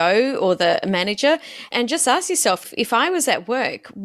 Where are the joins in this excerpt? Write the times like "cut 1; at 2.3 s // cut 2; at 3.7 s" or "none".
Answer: cut 1; at 1.7 s // cut 2; at 2.6 s